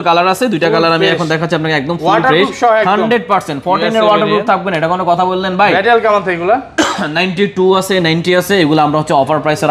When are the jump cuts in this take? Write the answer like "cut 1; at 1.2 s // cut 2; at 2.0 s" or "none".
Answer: none